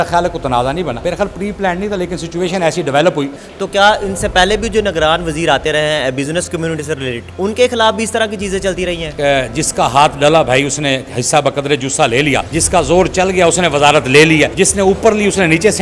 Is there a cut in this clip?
yes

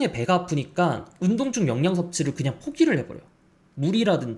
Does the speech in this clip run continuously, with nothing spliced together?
yes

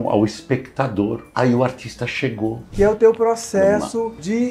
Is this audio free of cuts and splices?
no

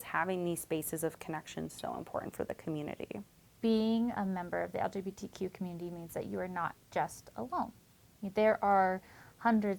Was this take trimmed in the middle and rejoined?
yes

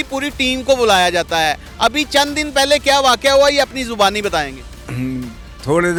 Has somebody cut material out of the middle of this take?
no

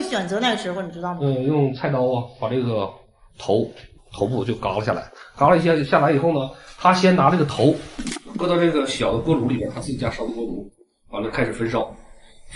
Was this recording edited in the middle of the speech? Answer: yes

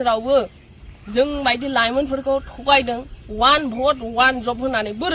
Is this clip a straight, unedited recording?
yes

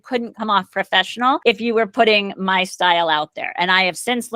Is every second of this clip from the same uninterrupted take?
no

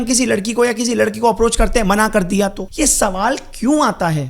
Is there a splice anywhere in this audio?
yes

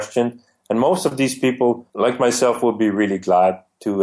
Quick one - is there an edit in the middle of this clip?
yes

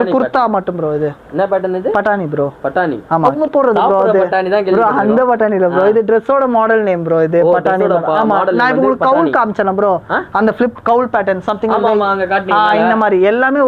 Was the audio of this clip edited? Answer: yes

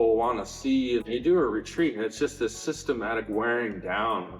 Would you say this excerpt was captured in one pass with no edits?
no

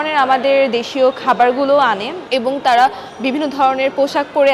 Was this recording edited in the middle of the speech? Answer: yes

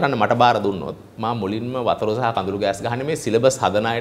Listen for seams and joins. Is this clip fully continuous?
yes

